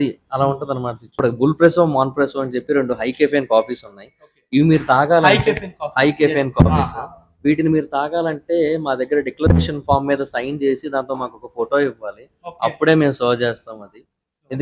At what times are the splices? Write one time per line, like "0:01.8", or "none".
0:01.2